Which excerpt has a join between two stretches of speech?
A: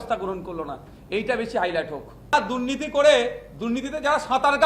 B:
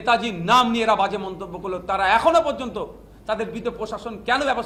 A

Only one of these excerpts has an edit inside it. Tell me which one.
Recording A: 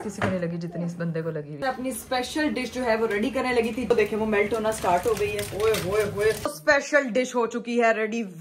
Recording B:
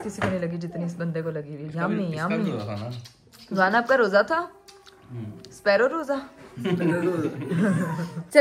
A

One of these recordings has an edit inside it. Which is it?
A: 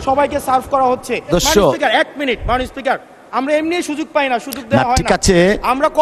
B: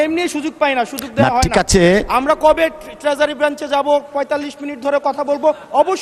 A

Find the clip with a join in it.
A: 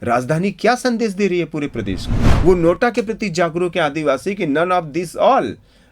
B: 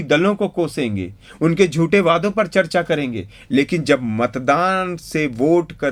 A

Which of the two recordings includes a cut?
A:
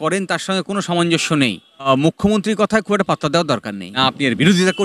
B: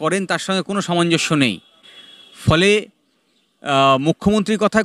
A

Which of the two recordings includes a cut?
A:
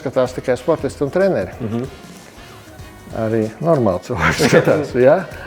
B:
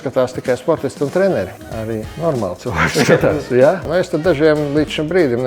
B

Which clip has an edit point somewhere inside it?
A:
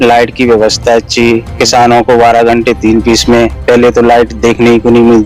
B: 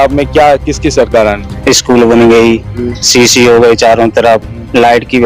B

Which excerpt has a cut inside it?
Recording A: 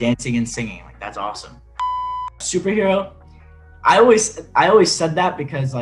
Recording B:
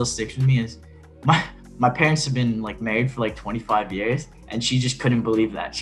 A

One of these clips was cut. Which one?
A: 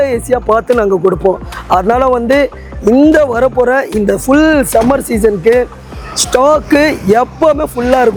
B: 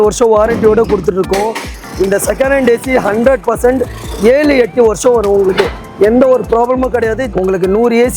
B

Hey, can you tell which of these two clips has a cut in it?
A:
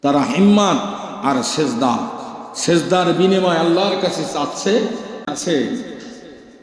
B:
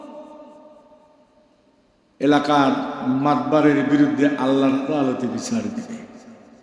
A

